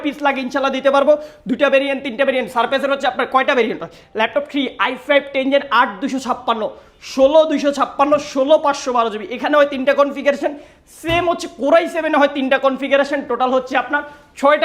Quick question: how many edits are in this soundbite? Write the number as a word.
zero